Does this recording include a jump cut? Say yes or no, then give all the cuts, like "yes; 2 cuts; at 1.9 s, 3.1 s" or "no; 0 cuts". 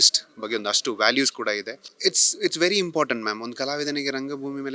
no; 0 cuts